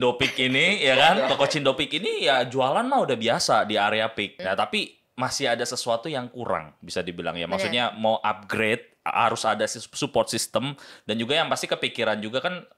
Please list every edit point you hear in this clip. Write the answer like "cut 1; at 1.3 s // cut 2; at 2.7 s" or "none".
cut 1; at 4.3 s